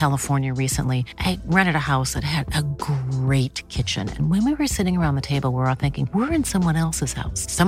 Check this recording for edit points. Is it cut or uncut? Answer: uncut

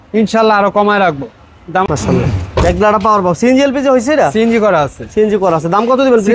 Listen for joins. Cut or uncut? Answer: cut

